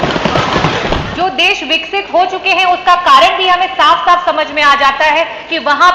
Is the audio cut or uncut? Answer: cut